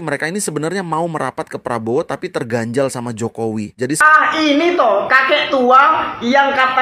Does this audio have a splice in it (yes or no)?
yes